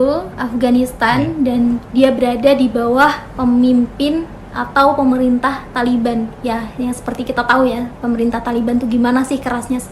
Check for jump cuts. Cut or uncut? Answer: uncut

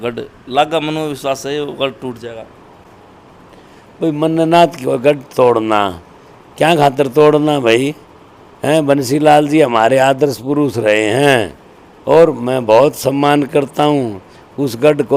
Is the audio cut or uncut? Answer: uncut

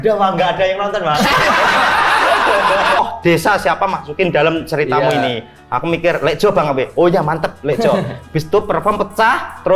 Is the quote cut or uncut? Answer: cut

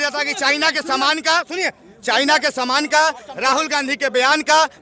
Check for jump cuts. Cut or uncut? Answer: uncut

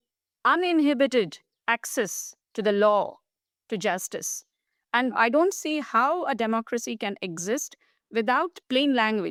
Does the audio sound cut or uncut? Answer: uncut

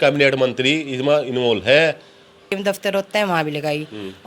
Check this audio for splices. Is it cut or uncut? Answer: cut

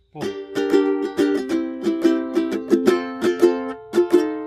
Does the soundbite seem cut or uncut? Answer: uncut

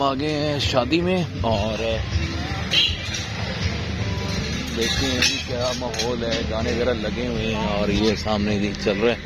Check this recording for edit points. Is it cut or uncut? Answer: uncut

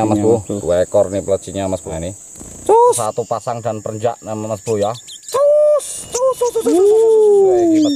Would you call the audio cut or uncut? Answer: cut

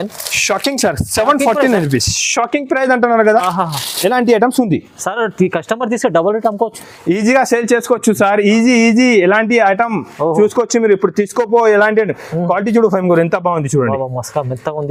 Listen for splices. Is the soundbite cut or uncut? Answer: uncut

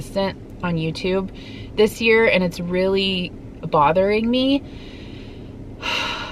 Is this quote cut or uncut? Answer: uncut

